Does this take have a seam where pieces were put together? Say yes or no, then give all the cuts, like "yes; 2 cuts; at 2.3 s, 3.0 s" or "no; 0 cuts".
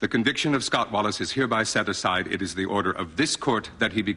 no; 0 cuts